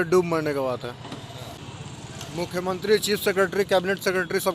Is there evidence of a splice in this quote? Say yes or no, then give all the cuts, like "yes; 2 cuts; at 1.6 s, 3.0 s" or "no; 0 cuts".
yes; 1 cut; at 1.6 s